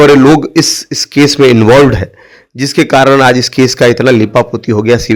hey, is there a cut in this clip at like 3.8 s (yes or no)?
no